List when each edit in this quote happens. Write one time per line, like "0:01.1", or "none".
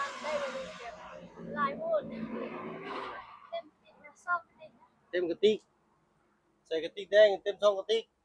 0:03.2